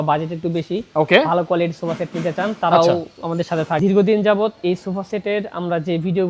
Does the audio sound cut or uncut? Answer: cut